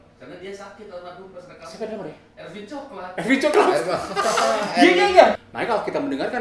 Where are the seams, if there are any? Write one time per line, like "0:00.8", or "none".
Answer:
0:05.5